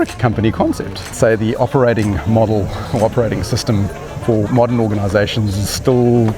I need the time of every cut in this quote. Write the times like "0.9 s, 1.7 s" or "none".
1.1 s